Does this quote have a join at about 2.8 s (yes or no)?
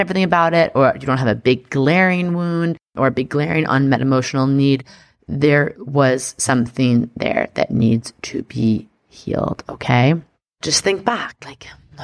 no